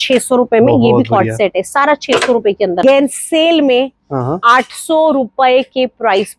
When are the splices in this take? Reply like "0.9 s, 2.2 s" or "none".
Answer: 2.8 s